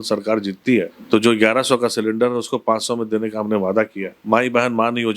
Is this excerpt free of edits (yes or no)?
no